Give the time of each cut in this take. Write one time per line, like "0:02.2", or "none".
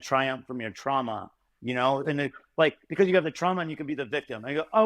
none